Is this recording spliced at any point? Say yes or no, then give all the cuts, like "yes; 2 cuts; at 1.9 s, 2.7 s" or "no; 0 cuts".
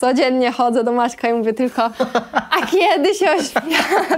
no; 0 cuts